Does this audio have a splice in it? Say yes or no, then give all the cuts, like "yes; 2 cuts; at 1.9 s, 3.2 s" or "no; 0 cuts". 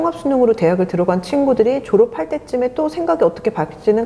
no; 0 cuts